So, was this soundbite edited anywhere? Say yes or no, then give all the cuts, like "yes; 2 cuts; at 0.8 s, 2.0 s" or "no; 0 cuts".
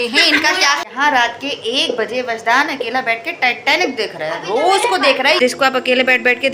yes; 2 cuts; at 0.8 s, 5.4 s